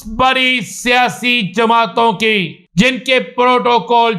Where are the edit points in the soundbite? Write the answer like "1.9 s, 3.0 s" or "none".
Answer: 2.6 s